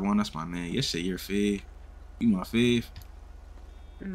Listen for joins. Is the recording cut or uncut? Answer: uncut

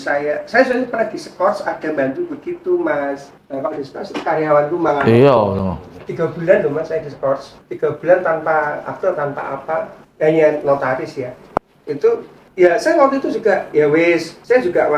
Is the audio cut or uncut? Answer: uncut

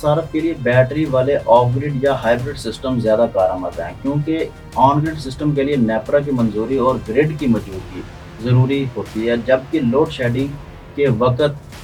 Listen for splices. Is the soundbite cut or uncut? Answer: uncut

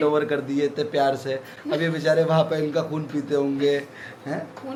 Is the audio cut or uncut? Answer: uncut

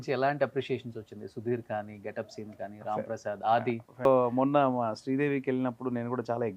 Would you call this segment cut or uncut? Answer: cut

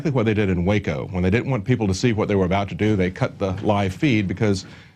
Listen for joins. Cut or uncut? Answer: cut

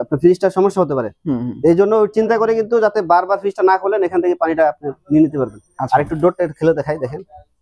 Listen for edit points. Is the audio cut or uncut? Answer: uncut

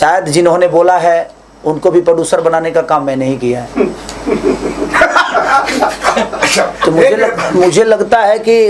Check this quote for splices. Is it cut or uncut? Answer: uncut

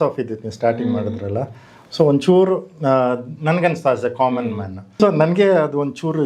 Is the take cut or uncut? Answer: cut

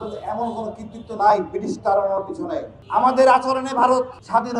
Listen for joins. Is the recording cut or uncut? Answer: cut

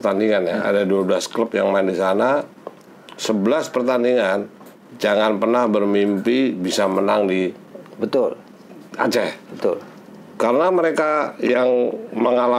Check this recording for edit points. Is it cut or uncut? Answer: uncut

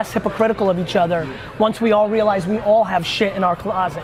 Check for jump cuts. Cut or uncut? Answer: uncut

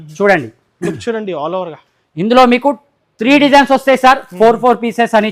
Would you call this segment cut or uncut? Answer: uncut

